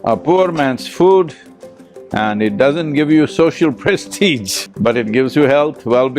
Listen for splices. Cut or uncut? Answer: uncut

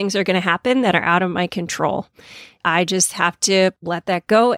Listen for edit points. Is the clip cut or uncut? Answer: cut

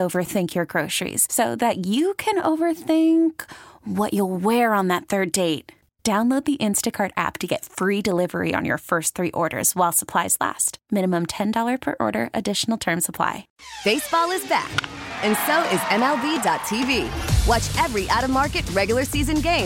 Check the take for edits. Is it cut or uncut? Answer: cut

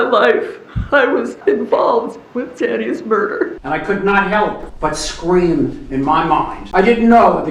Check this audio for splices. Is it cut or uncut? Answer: cut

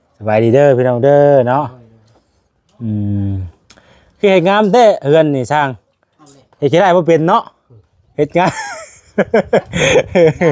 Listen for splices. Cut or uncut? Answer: uncut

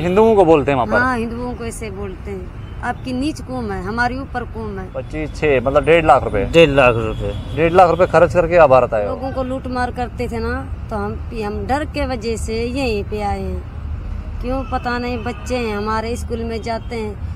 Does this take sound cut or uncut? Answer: cut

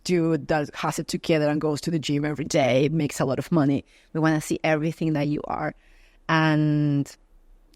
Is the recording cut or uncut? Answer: uncut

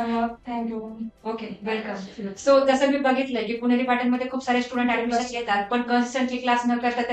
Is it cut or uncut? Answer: cut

